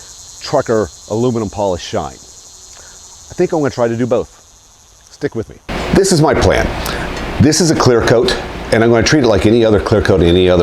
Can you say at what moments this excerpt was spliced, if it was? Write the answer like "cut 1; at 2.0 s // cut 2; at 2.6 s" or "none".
cut 1; at 5.7 s